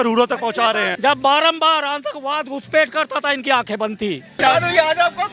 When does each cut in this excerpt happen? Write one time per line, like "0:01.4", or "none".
0:00.9
0:04.4